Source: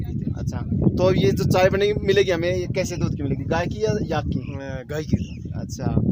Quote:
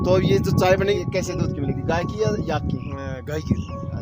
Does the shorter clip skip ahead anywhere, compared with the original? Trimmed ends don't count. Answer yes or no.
yes